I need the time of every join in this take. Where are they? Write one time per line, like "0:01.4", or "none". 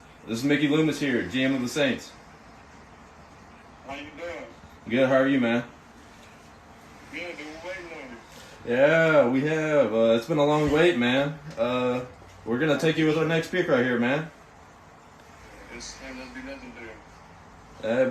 none